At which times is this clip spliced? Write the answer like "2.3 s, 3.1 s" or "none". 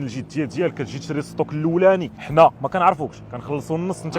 2.2 s